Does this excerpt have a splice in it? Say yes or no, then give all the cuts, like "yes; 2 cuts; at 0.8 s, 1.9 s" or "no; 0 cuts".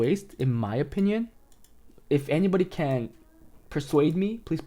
no; 0 cuts